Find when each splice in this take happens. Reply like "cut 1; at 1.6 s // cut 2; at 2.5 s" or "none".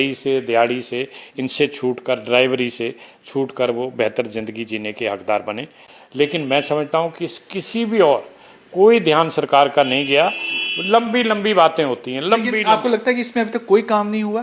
none

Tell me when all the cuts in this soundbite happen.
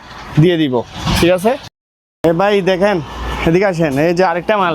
none

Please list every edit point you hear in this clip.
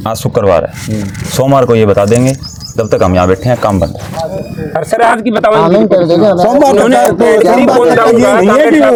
none

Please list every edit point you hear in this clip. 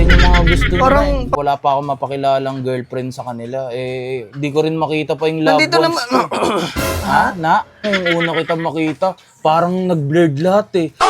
cut 1; at 1.4 s // cut 2; at 7.9 s

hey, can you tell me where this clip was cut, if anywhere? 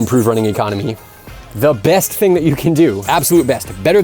cut 1; at 3.0 s

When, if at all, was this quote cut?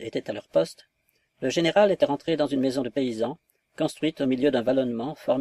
cut 1; at 1.3 s

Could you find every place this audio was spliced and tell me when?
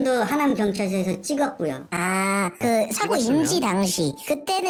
none

